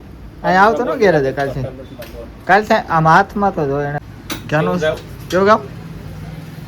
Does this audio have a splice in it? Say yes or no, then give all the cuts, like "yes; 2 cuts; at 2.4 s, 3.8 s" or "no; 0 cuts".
yes; 1 cut; at 4.0 s